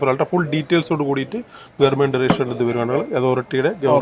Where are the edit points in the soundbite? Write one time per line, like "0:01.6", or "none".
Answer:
none